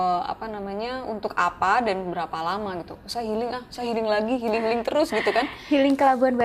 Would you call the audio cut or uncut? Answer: uncut